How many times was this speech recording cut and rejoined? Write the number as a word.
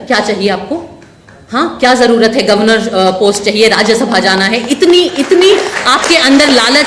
zero